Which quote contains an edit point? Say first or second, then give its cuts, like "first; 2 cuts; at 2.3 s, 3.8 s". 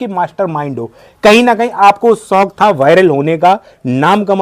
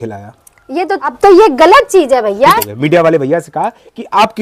second; 2 cuts; at 1.1 s, 2.6 s